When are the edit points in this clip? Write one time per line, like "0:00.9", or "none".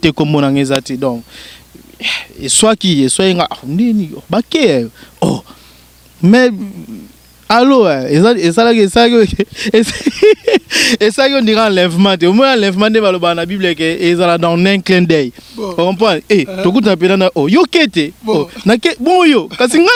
none